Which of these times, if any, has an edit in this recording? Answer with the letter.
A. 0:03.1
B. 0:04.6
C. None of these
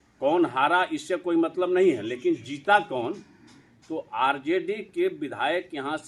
C